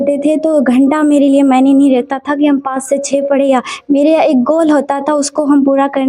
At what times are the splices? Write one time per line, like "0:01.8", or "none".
none